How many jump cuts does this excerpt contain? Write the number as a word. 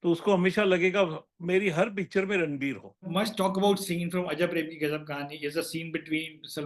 one